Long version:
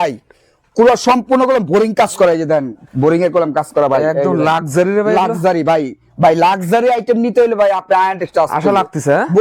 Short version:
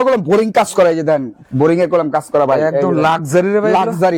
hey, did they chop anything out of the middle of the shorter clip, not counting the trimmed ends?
no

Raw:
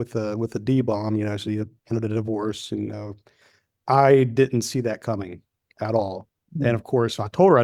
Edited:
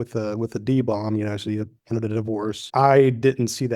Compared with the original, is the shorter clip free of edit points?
no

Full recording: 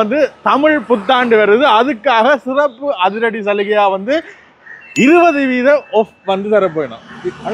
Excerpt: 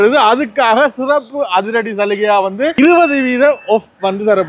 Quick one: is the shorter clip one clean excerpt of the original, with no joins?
no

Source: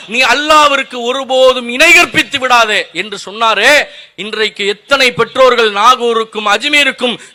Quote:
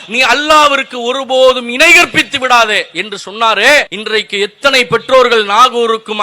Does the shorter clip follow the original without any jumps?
no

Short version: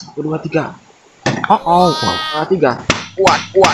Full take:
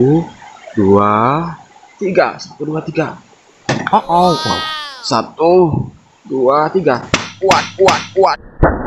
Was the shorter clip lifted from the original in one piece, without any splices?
no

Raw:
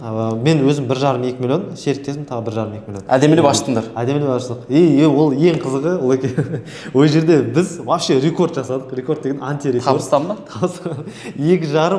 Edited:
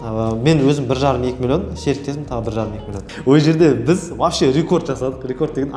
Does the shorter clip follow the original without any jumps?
no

